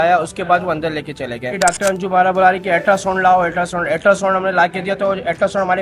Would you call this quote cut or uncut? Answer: cut